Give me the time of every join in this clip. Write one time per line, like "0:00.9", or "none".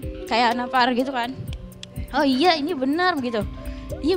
none